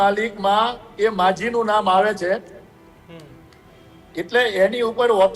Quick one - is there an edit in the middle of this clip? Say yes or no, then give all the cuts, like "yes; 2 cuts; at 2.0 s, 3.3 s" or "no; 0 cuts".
no; 0 cuts